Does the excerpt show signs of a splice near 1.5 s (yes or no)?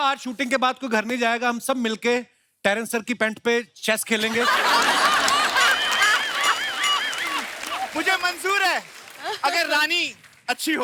no